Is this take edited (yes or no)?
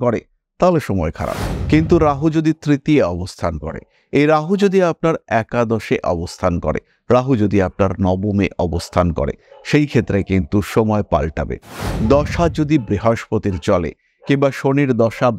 no